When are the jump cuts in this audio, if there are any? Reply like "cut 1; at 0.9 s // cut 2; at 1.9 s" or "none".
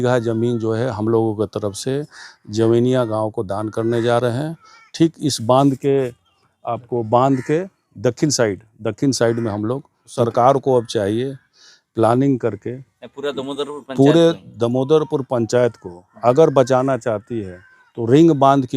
cut 1; at 10.1 s